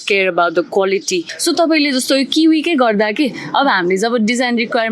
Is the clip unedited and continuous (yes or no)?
no